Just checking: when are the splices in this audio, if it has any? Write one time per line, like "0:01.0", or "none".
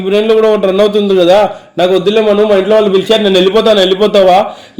none